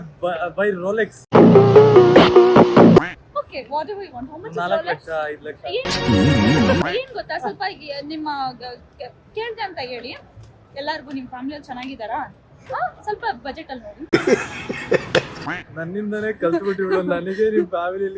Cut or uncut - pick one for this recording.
uncut